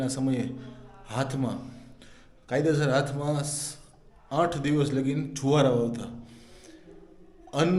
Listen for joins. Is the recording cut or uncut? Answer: uncut